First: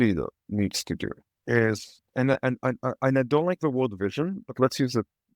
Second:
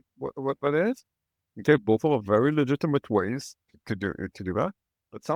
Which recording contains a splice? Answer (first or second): first